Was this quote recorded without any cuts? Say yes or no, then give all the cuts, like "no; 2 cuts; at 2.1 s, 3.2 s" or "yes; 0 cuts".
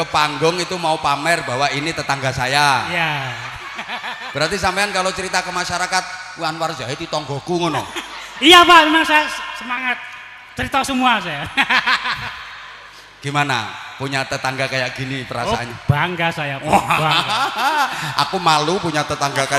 yes; 0 cuts